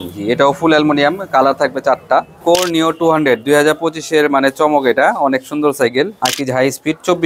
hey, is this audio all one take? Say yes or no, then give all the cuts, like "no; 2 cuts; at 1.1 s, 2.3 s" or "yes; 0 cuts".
no; 2 cuts; at 2.4 s, 6.2 s